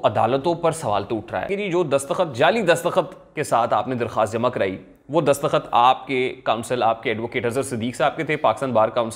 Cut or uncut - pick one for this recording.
cut